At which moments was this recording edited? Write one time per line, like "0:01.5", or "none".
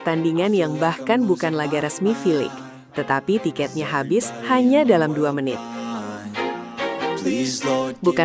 none